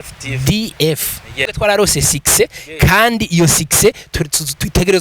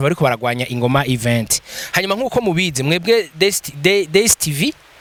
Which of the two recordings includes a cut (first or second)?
first